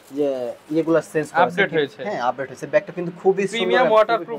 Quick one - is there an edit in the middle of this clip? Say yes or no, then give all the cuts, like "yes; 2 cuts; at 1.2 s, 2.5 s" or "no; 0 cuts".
no; 0 cuts